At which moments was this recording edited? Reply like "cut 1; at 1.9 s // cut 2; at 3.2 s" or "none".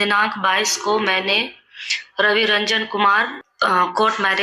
cut 1; at 3.4 s